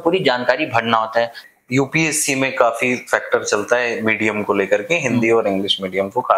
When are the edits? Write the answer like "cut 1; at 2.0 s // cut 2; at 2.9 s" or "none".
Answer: cut 1; at 1.4 s